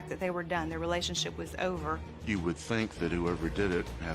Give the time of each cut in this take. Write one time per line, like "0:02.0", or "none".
0:02.1